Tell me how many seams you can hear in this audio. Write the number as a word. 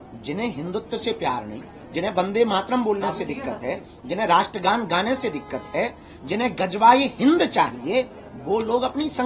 zero